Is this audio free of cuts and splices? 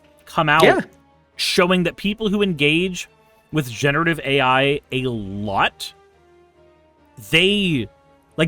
yes; 0 cuts

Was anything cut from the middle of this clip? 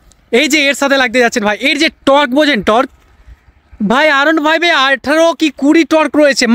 no; 0 cuts

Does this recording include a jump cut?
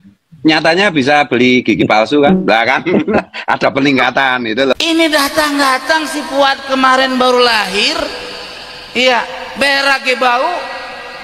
yes; 1 cut; at 4.8 s

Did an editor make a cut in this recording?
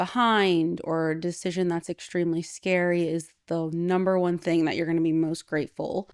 no; 0 cuts

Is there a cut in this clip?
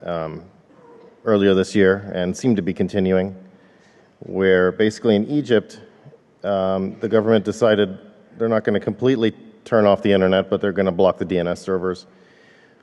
no; 0 cuts

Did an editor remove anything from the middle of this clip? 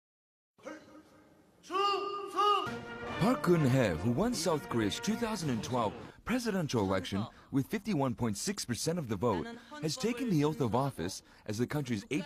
no; 0 cuts

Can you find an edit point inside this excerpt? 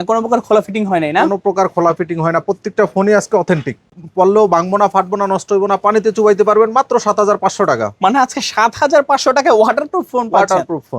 yes; 1 cut; at 3.9 s

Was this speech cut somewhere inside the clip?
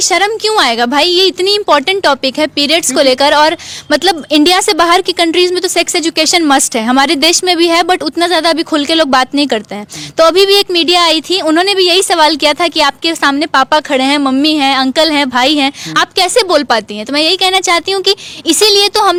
no; 0 cuts

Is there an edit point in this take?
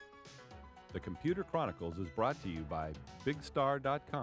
yes; 1 cut; at 0.9 s

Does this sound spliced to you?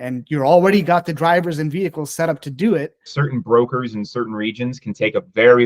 yes; 1 cut; at 3.1 s

